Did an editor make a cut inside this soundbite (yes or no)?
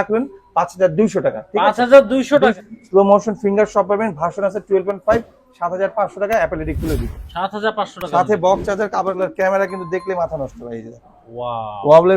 yes